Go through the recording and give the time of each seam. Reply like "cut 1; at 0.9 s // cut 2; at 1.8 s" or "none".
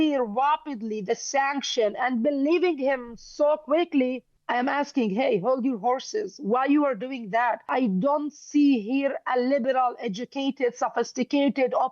cut 1; at 4.3 s // cut 2; at 7.7 s